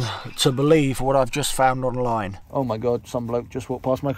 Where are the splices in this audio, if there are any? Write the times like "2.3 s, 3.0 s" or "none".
2.4 s